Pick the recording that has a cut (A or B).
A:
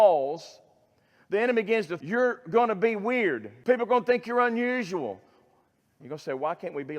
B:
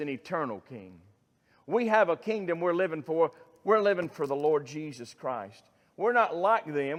A